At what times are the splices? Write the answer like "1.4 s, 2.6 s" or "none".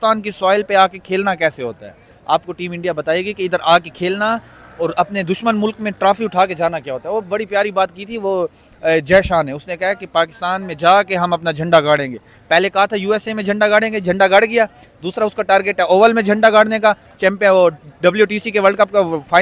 none